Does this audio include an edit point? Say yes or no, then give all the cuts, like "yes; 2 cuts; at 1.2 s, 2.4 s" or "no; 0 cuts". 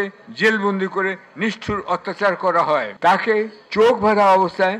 yes; 1 cut; at 2.9 s